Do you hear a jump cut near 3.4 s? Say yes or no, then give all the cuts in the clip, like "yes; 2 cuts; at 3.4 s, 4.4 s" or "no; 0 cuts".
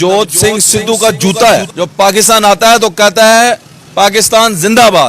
no; 1 cut; at 1.7 s